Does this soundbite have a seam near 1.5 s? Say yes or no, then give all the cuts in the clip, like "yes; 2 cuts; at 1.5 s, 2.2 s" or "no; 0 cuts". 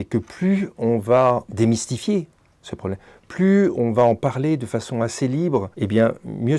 yes; 2 cuts; at 1.5 s, 5.7 s